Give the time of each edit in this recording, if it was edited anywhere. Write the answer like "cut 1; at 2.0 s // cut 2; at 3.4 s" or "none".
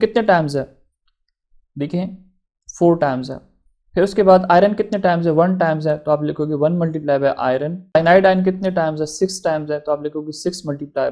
cut 1; at 7.9 s